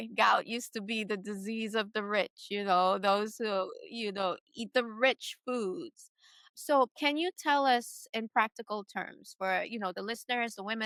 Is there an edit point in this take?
no; 0 cuts

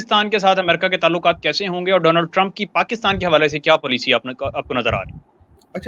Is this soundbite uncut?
yes; 0 cuts

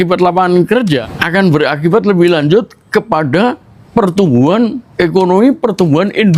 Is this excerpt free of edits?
no; 1 cut; at 1.1 s

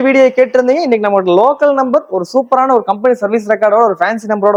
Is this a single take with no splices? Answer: yes; 0 cuts

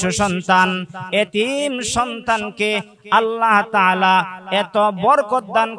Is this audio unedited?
yes; 0 cuts

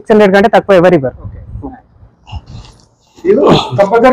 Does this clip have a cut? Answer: no; 0 cuts

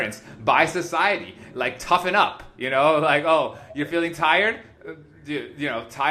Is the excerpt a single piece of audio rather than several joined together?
yes; 0 cuts

